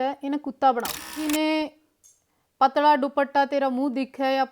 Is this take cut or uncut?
cut